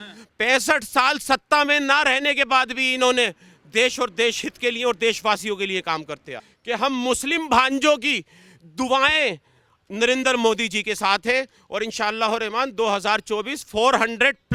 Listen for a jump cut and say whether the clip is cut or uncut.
uncut